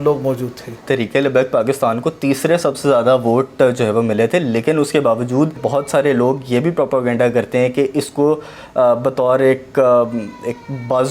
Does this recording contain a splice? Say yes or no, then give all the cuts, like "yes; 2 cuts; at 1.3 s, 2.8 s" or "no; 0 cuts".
yes; 2 cuts; at 0.8 s, 5.6 s